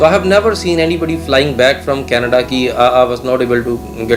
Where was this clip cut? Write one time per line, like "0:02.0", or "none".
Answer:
none